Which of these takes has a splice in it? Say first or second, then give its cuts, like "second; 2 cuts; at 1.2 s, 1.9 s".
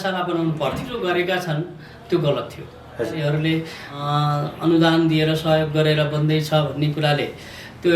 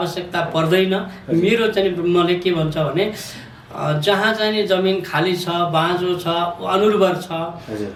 first; 3 cuts; at 0.9 s, 3.2 s, 4.0 s